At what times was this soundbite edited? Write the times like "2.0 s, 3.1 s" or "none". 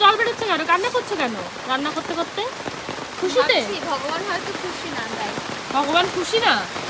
none

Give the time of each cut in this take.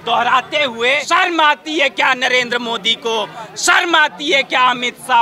1.0 s

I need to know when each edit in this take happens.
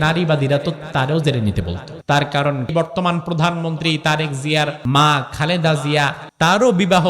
1.9 s, 2.7 s, 4.8 s, 6.2 s

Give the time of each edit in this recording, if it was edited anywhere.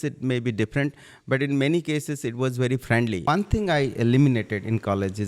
3.3 s

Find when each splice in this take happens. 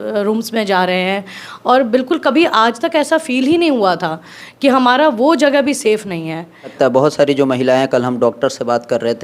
6.7 s

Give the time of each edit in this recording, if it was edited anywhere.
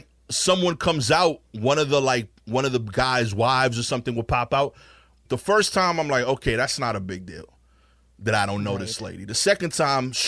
none

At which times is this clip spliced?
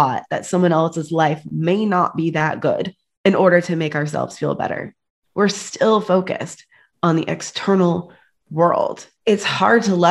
9.1 s

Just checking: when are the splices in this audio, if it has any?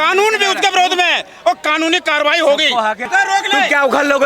3.0 s

